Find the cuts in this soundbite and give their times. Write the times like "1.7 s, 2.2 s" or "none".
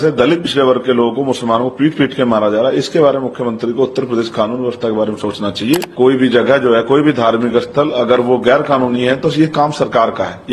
5.9 s